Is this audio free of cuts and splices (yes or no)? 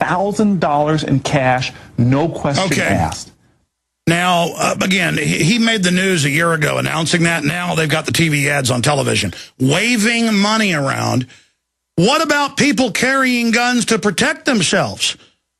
yes